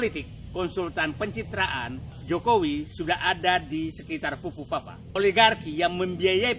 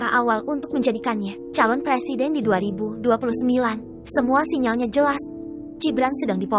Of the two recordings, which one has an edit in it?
first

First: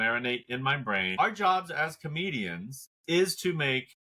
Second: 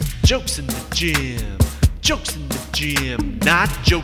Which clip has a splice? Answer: first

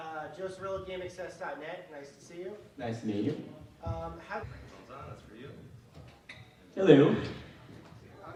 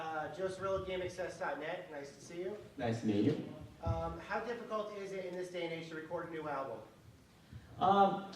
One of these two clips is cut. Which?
second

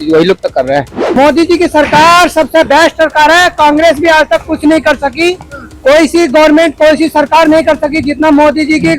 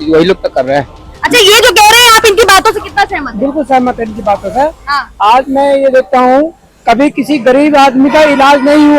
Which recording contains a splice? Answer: first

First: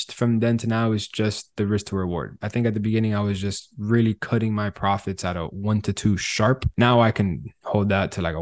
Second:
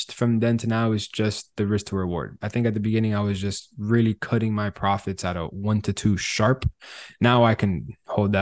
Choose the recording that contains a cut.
first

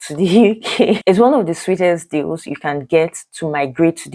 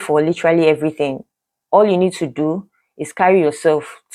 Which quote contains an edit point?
first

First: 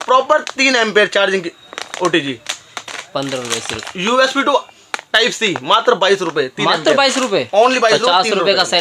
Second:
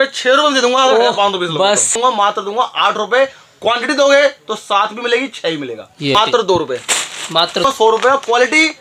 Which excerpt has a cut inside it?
second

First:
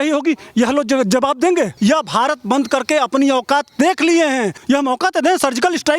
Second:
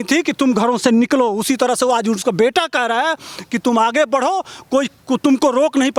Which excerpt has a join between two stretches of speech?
first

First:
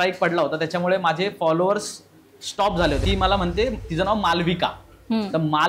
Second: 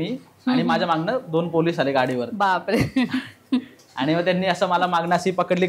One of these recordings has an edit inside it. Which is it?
first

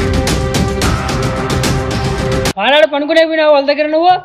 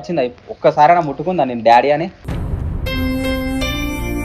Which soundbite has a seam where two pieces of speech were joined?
first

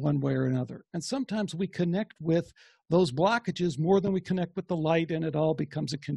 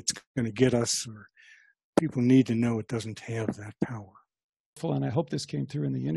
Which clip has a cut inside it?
second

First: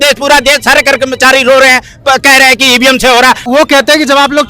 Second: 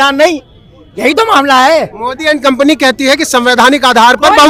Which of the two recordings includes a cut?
first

